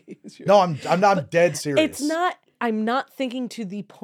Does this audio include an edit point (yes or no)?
yes